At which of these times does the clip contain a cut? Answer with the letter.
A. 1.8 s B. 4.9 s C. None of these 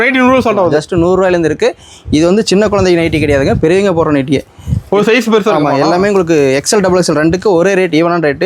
C